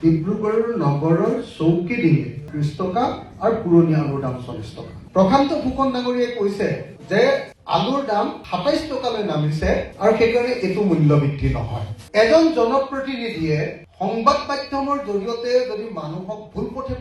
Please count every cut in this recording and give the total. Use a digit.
2